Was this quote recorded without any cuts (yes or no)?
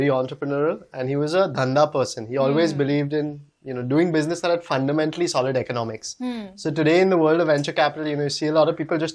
yes